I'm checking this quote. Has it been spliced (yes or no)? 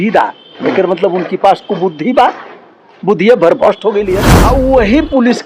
yes